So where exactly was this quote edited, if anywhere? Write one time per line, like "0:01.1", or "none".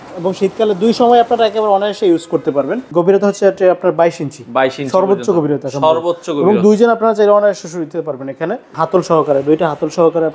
0:02.9
0:08.6

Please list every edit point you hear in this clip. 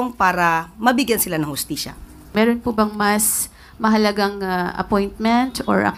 0:02.3

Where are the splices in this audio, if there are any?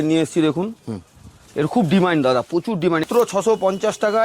0:03.1

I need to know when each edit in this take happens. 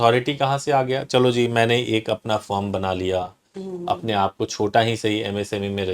none

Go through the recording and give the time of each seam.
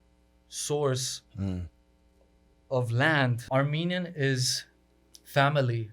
0:03.4

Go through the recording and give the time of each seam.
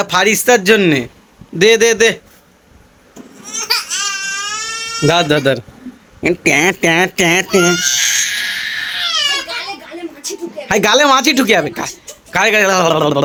none

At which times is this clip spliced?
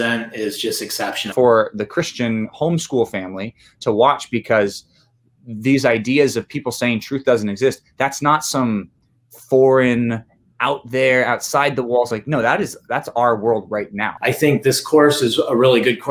0:01.3
0:14.1

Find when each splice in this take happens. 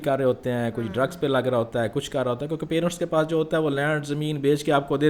none

